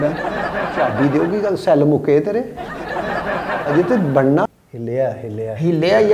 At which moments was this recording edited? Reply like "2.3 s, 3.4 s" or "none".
4.5 s